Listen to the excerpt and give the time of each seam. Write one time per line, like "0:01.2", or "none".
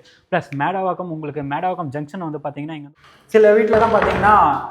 0:02.8